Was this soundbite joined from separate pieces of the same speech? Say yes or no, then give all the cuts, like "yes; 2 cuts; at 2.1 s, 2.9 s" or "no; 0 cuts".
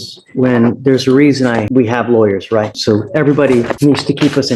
yes; 3 cuts; at 1.7 s, 2.7 s, 3.7 s